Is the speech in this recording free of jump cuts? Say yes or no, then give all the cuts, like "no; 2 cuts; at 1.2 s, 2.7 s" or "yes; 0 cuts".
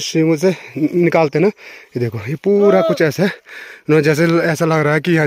yes; 0 cuts